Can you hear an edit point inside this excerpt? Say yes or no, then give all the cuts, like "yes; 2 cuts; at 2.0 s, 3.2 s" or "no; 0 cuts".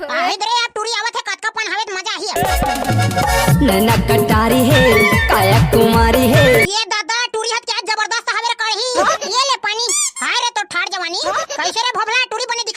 yes; 1 cut; at 9.2 s